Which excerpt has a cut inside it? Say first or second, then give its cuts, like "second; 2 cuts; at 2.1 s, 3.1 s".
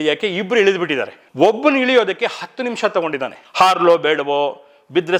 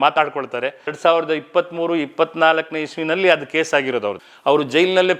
second; 2 cuts; at 0.8 s, 4.2 s